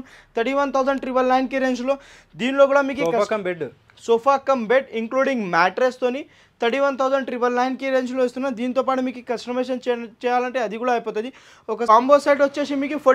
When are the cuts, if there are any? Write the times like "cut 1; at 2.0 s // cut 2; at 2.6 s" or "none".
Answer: cut 1; at 11.9 s